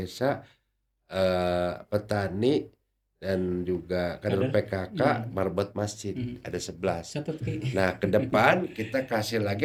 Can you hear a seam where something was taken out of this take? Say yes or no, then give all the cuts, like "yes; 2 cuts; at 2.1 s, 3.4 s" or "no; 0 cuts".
no; 0 cuts